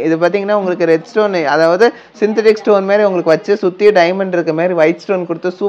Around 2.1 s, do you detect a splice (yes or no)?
no